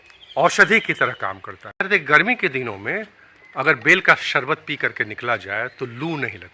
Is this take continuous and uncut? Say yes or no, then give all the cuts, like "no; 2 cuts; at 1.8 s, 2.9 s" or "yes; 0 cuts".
no; 1 cut; at 1.9 s